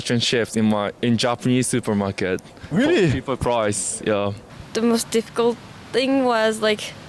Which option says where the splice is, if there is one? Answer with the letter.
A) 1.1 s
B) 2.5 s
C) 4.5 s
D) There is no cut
C